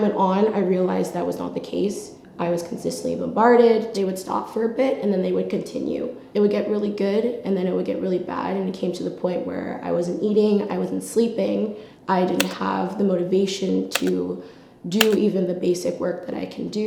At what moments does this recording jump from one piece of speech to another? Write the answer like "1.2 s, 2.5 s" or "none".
none